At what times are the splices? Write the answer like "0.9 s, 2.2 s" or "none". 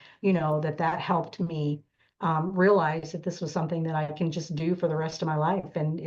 none